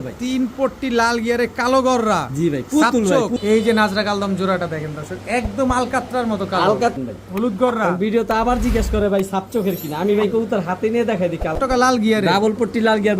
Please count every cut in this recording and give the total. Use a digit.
3